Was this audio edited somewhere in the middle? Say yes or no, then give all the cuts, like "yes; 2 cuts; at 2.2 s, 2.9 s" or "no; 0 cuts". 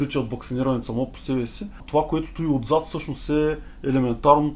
yes; 1 cut; at 1.8 s